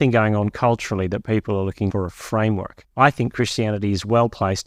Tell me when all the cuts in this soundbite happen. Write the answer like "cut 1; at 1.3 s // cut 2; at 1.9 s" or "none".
cut 1; at 1.9 s // cut 2; at 2.8 s